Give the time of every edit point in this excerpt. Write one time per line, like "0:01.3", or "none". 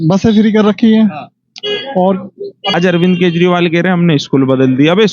0:02.7